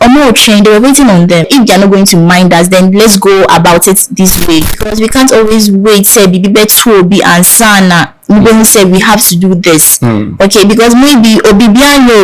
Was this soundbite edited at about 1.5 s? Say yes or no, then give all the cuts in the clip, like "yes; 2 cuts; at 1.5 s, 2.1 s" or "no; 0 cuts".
yes; 2 cuts; at 1.5 s, 4.8 s